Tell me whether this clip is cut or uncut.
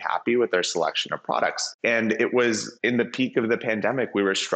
cut